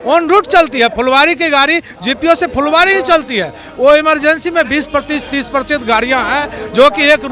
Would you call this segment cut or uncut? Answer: uncut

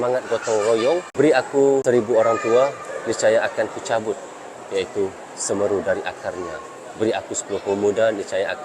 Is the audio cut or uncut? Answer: cut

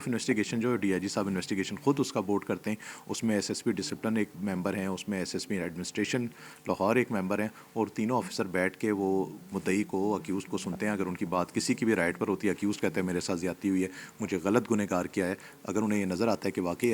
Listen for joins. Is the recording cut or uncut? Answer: uncut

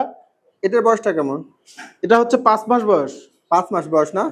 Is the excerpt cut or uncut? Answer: uncut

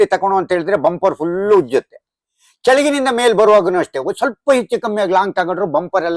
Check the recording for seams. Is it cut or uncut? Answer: uncut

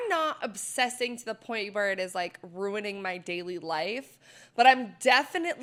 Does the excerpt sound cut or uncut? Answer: uncut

